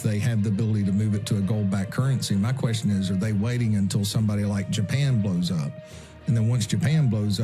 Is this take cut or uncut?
uncut